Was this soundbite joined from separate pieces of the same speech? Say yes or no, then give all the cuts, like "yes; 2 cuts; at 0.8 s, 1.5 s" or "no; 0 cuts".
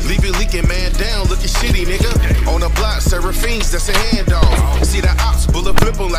no; 0 cuts